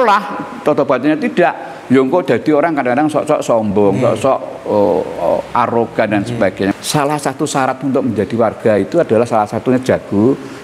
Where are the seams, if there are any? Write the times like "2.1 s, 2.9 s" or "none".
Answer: 6.7 s